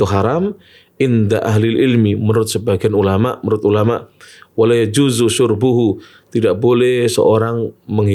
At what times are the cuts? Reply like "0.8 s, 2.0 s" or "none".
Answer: none